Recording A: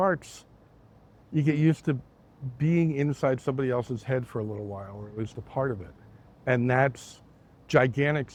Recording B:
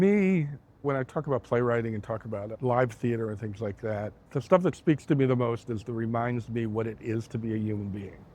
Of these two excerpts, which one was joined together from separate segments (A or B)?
B